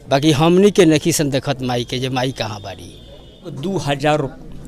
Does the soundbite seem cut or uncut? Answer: cut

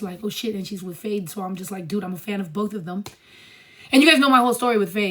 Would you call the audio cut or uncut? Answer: uncut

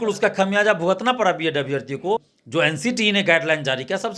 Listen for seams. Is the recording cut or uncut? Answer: cut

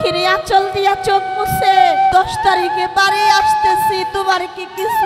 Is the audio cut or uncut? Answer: cut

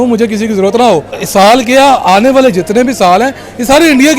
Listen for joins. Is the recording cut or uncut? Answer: cut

